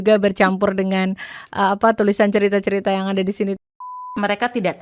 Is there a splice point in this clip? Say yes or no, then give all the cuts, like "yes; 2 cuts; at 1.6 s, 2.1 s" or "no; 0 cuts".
yes; 1 cut; at 3.6 s